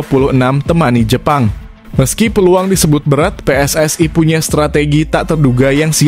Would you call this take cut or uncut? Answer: uncut